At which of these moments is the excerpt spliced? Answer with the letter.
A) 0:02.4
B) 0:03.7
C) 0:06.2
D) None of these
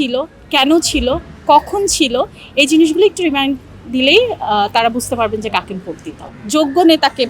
C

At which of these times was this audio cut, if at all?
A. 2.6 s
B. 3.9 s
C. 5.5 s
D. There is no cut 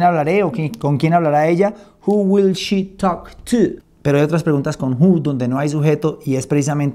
B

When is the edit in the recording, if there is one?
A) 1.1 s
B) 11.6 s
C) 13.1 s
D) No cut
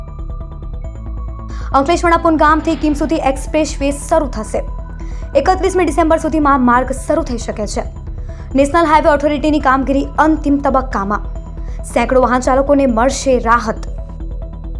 D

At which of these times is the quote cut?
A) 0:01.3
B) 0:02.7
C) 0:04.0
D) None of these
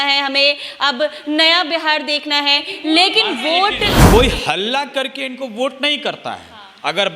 C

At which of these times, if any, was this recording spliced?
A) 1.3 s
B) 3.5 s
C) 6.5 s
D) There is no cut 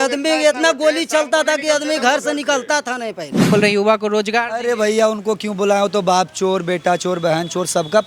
B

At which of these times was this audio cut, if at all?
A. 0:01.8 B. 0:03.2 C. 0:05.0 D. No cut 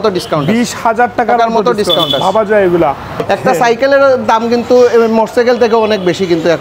B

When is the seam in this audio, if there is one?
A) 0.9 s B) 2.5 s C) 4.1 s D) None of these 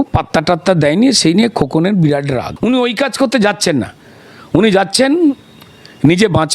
B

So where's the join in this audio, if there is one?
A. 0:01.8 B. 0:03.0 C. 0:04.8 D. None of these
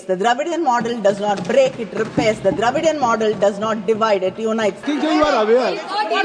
C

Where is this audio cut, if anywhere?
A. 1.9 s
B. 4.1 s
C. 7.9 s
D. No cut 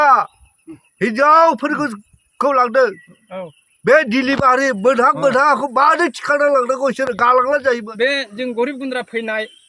C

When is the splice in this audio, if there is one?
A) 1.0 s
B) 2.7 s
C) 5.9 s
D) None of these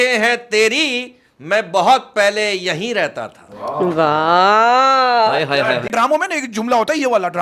C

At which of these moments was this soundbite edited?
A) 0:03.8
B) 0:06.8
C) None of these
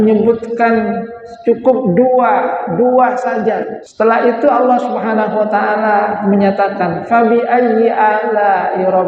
A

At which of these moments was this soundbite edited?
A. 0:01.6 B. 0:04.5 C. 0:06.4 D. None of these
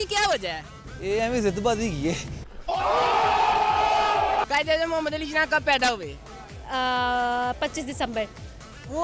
B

